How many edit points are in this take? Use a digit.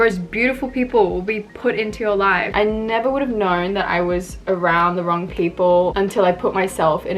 2